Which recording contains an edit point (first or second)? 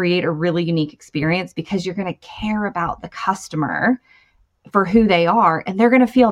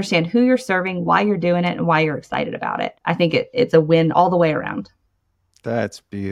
second